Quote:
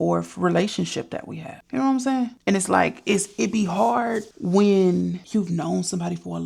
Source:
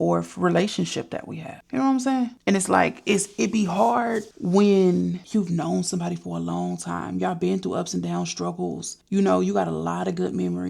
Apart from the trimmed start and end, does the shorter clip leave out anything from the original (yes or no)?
no